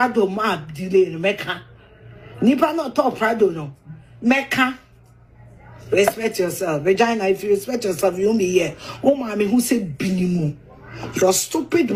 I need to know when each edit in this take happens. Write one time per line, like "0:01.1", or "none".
none